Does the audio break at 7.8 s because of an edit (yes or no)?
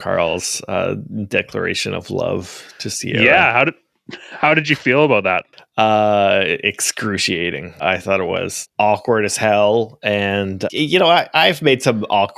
yes